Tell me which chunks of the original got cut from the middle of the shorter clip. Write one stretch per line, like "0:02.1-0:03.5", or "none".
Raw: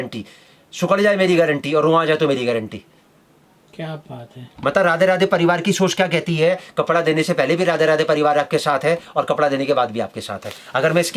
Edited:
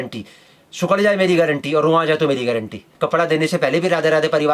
0:02.9-0:06.7